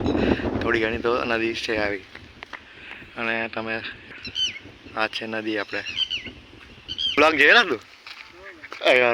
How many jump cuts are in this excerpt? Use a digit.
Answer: 0